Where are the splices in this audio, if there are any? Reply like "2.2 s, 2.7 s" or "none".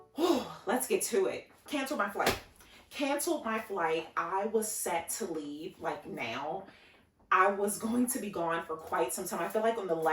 1.5 s